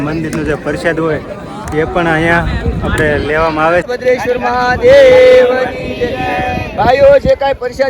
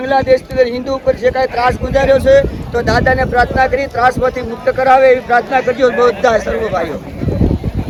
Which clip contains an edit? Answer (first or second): first